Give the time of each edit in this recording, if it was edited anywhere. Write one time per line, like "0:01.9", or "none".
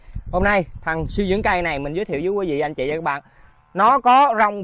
none